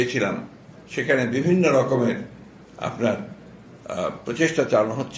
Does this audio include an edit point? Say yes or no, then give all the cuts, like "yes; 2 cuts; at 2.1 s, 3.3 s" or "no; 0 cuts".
no; 0 cuts